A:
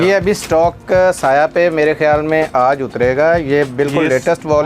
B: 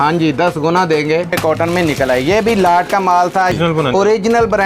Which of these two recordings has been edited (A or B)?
B